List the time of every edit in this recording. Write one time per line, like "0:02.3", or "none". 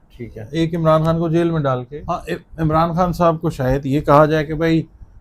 0:01.9